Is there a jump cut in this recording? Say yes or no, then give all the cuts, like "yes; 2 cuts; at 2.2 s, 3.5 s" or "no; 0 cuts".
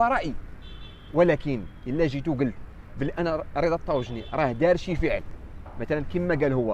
no; 0 cuts